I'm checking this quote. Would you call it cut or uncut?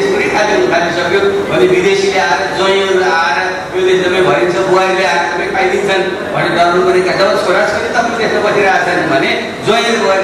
uncut